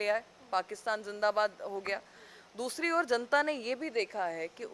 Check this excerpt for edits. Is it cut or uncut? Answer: uncut